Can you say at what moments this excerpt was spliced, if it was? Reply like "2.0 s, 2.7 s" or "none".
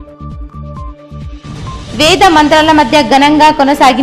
1.5 s